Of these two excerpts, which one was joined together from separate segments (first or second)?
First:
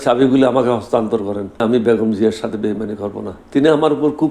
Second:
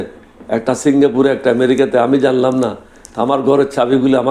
first